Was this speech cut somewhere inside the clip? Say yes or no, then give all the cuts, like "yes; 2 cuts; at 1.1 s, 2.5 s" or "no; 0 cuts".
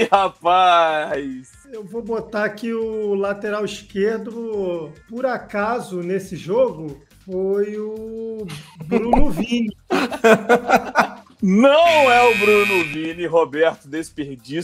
no; 0 cuts